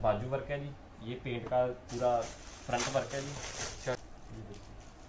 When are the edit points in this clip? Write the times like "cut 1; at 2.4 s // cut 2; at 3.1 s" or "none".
cut 1; at 4.0 s